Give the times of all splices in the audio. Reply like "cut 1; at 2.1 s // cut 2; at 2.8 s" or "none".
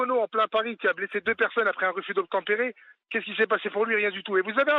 none

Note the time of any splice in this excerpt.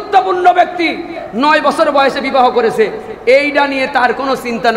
cut 1; at 1.2 s

